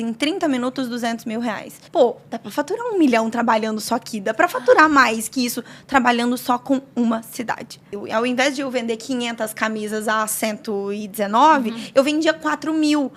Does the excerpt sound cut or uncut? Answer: cut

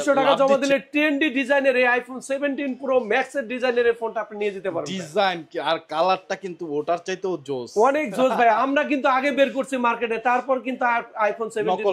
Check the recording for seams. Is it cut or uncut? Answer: uncut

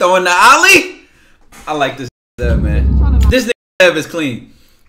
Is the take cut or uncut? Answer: uncut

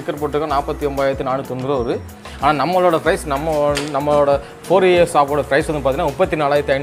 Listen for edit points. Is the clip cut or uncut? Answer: uncut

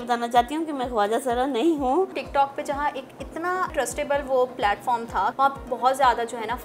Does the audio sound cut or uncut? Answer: cut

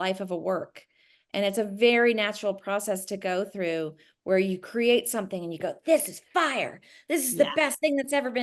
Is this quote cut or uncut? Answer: uncut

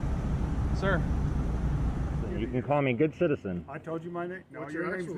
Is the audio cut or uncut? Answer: cut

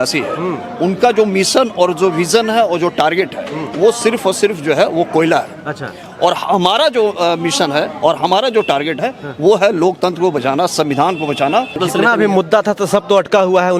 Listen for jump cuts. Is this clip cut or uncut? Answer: cut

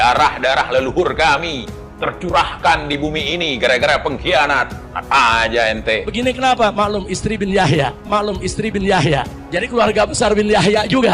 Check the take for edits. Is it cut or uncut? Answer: cut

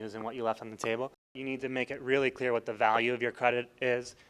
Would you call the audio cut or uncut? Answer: cut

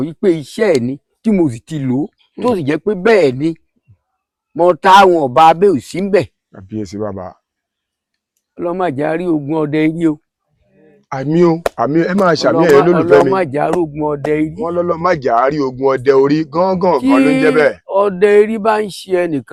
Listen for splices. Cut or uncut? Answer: uncut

